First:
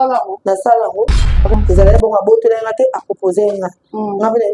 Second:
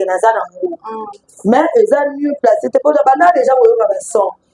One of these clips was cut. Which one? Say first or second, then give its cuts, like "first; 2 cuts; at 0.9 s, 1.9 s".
first; 1 cut; at 1.5 s